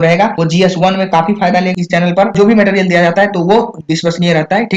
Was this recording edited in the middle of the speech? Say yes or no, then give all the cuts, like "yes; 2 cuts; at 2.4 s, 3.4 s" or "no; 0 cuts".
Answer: yes; 1 cut; at 1.7 s